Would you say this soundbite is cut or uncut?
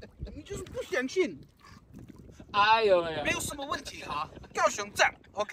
uncut